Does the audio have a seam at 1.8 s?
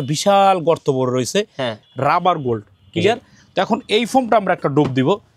yes; 1 cut; at 1.8 s

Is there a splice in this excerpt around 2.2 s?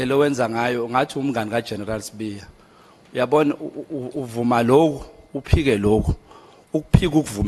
no; 0 cuts

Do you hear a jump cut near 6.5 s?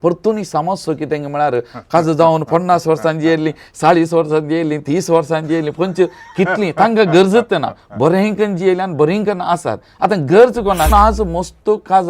no; 1 cut; at 10.9 s

